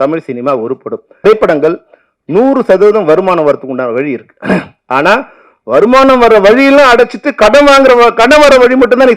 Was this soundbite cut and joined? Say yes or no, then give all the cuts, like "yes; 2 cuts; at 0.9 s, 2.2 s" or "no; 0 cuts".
yes; 1 cut; at 1.2 s